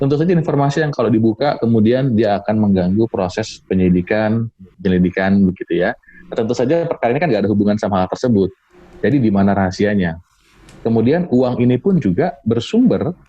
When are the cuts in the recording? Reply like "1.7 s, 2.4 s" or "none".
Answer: 4.7 s